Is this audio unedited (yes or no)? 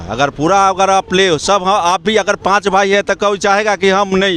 yes